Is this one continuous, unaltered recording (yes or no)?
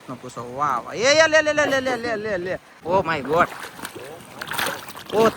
no